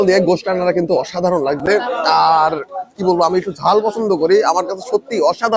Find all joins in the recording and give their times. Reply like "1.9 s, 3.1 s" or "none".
none